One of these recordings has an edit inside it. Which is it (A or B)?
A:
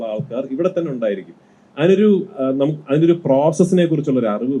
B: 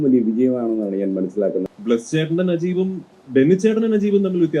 B